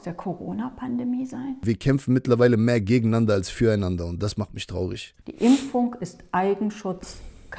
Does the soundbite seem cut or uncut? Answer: cut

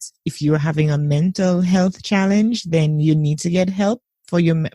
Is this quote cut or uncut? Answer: uncut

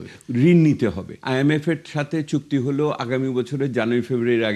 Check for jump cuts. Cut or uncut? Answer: cut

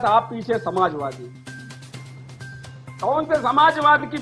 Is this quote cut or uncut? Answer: uncut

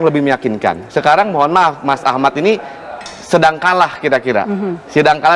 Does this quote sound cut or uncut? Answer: uncut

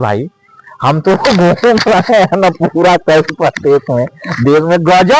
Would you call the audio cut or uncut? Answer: uncut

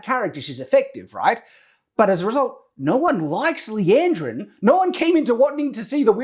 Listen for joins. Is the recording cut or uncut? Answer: uncut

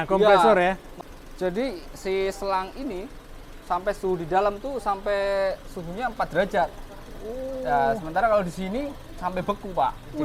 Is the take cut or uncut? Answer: uncut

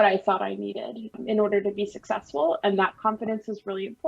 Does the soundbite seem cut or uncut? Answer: cut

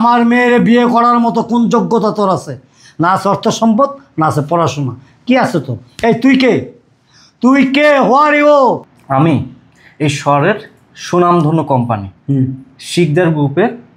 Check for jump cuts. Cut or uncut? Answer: cut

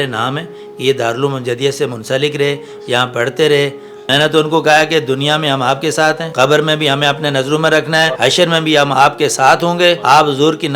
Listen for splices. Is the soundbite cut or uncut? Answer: cut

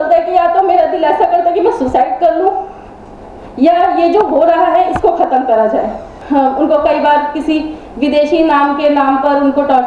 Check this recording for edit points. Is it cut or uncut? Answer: cut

